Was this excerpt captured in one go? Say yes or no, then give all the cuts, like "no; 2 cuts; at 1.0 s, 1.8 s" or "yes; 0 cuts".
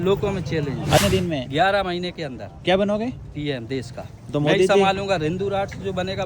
no; 1 cut; at 1.0 s